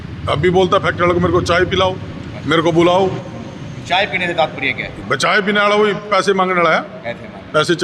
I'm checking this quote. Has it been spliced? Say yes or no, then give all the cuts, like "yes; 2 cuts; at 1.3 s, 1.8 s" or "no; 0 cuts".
no; 0 cuts